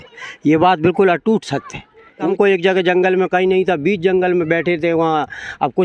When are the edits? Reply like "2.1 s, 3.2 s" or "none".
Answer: 2.3 s